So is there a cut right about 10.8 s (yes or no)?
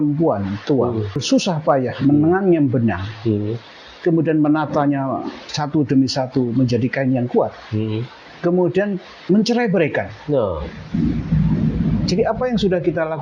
no